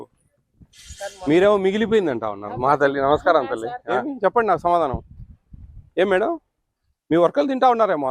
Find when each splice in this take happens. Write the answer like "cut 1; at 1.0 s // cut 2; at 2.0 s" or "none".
cut 1; at 4.1 s